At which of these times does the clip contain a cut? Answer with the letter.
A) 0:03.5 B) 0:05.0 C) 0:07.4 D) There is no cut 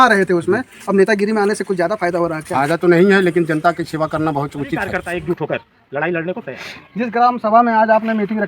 B